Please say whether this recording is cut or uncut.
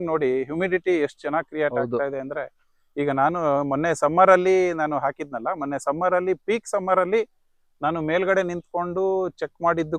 uncut